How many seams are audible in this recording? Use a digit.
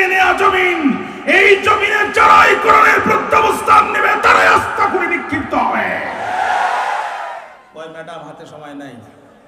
1